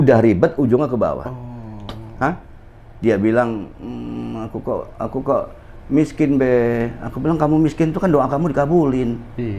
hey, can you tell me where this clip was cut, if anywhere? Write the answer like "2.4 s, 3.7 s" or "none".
none